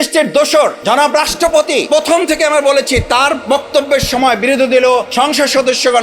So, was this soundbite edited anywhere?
yes; 3 cuts; at 0.8 s, 1.9 s, 5.1 s

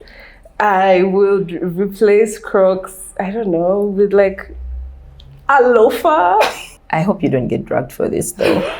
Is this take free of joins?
no; 1 cut; at 6.6 s

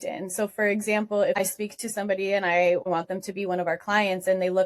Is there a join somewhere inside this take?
yes; 2 cuts; at 1.4 s, 2.9 s

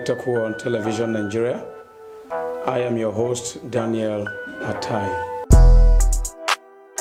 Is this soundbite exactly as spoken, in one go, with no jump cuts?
yes; 0 cuts

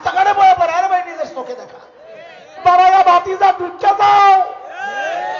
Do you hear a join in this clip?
yes; 1 cut; at 2.6 s

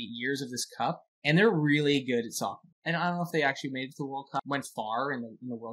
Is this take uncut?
no; 3 cuts; at 1.1 s, 2.7 s, 4.4 s

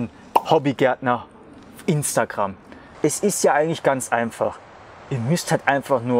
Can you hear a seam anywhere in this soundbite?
yes; 1 cut; at 3.0 s

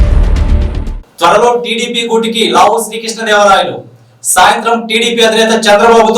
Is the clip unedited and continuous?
yes; 0 cuts

